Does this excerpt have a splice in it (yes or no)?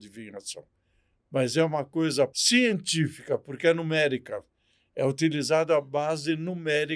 yes